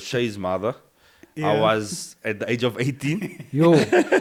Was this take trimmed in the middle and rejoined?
no; 0 cuts

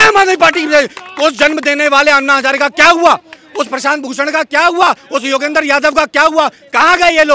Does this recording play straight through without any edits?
yes; 0 cuts

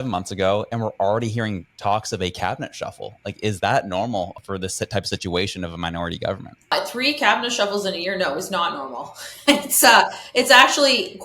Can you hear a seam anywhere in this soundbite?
yes; 2 cuts; at 4.3 s, 6.7 s

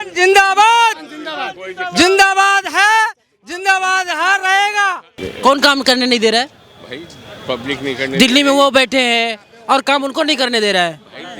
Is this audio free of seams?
no; 1 cut; at 5.2 s

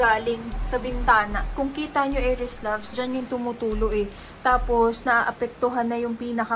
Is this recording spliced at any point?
yes; 2 cuts; at 1.5 s, 2.9 s

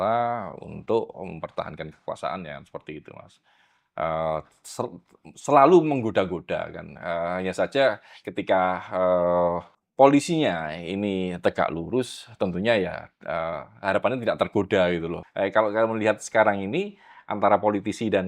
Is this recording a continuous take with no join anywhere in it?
no; 2 cuts; at 9.8 s, 15.2 s

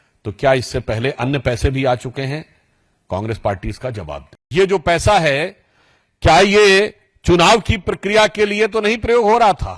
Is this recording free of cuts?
no; 1 cut; at 4.3 s

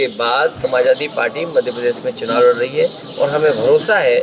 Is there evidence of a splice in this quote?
no; 0 cuts

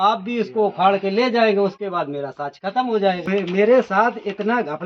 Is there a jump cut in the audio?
yes; 1 cut; at 3.3 s

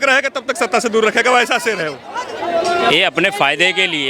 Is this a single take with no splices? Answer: no; 1 cut; at 2.1 s

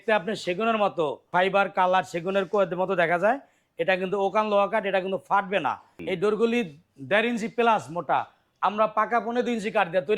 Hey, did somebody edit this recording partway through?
yes; 2 cuts; at 1.3 s, 5.9 s

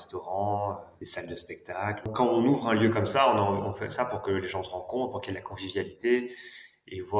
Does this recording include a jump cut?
yes; 2 cuts; at 1.0 s, 2.1 s

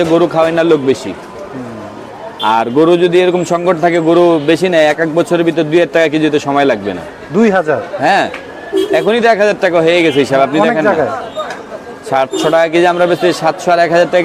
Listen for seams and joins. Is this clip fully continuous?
yes; 0 cuts

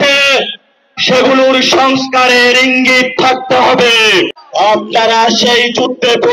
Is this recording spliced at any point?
yes; 1 cut; at 4.3 s

